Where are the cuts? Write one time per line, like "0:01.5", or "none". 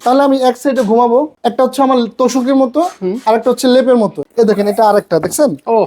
0:01.3
0:04.2

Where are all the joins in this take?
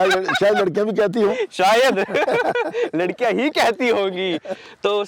none

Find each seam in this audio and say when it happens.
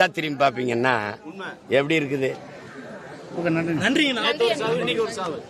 none

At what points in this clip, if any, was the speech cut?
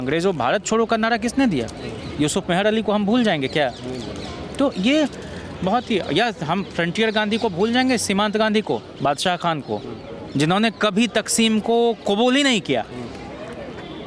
none

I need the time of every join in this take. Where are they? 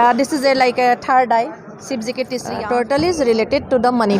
0:02.4

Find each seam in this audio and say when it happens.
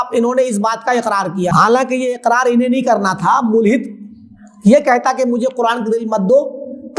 0:01.5

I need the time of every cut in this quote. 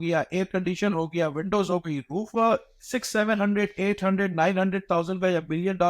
0:02.4

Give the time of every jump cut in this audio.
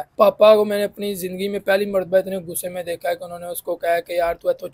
none

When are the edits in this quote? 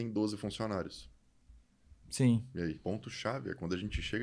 0:02.8

